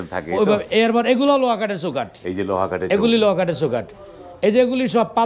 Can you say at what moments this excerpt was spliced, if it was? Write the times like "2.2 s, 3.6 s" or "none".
none